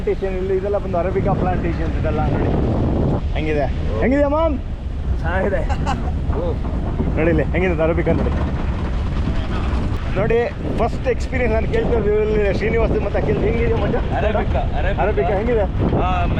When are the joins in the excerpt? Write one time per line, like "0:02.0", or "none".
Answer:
none